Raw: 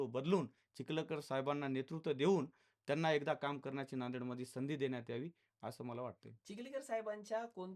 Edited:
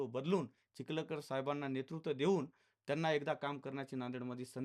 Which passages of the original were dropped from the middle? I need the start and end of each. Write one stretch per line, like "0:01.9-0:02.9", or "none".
none